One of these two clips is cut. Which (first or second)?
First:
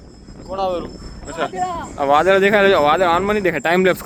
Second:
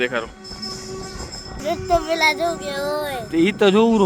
second